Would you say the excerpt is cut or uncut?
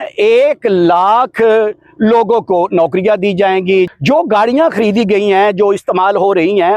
cut